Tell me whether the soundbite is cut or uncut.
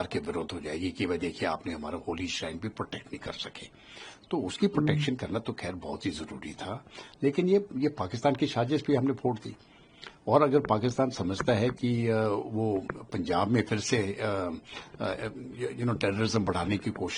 uncut